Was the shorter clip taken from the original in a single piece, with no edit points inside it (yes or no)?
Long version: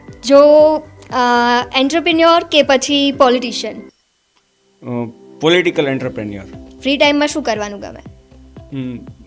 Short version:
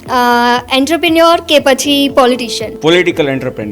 no